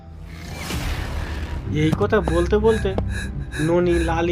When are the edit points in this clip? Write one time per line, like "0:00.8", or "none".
0:01.6